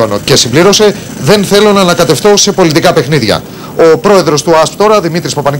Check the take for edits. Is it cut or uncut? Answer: uncut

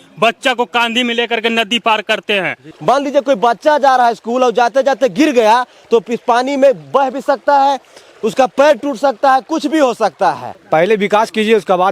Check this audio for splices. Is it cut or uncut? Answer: cut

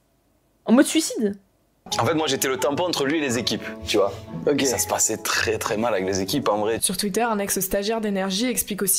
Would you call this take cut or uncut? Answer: cut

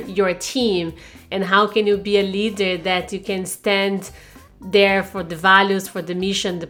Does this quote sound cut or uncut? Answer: uncut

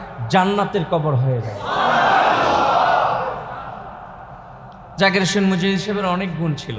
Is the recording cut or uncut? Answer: uncut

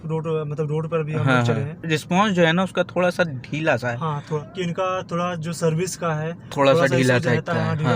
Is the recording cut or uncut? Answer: cut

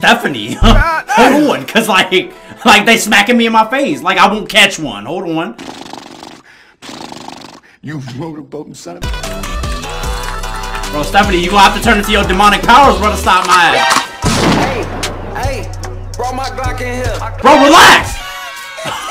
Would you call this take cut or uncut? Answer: cut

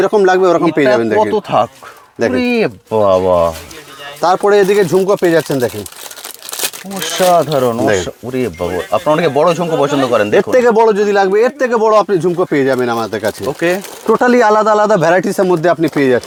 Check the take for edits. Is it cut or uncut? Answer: uncut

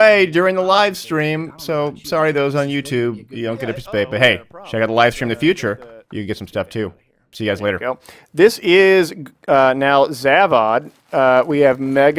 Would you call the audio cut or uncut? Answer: cut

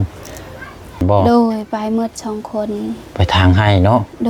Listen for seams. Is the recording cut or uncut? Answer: cut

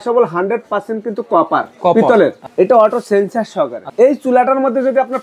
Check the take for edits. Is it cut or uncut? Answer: cut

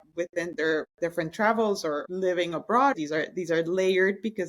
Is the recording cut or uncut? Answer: cut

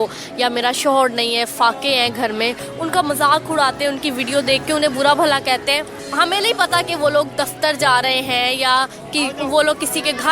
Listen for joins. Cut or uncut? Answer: cut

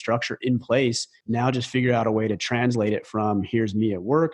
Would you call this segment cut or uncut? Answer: cut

